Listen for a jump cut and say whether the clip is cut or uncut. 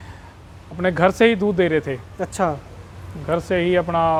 uncut